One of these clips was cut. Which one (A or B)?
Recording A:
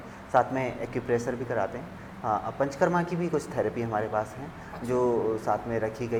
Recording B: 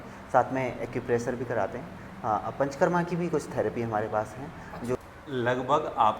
B